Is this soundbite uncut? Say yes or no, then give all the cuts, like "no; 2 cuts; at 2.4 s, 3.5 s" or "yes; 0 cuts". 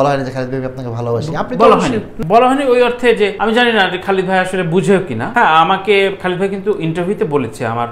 no; 3 cuts; at 2.1 s, 3.4 s, 5.2 s